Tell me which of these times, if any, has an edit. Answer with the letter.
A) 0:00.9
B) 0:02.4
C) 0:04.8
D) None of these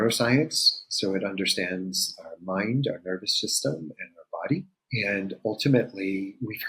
C